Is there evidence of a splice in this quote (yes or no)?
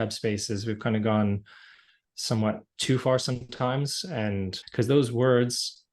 yes